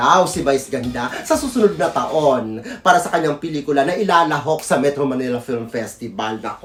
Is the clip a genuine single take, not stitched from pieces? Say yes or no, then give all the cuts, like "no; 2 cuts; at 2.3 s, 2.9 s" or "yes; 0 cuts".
yes; 0 cuts